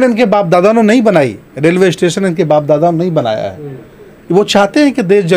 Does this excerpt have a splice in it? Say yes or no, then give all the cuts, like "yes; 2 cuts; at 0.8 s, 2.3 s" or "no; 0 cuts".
no; 0 cuts